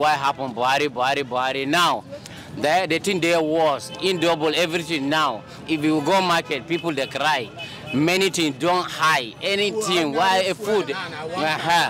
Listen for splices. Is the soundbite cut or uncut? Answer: uncut